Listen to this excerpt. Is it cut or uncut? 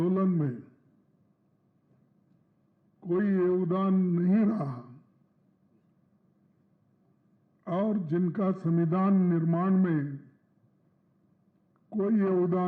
uncut